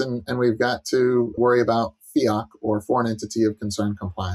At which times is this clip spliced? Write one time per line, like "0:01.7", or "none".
0:01.4